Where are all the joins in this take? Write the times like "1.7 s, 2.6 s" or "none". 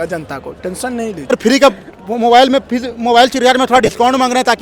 1.3 s